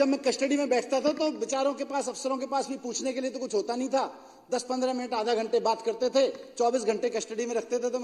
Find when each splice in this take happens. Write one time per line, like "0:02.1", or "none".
none